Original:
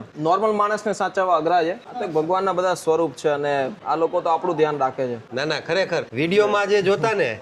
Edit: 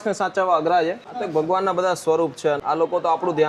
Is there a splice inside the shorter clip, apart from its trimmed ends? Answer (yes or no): yes